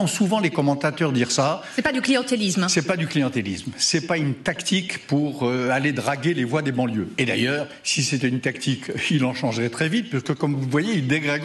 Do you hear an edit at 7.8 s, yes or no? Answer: no